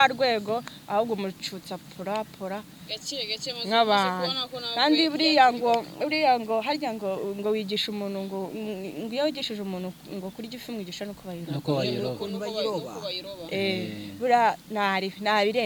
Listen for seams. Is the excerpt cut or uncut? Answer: uncut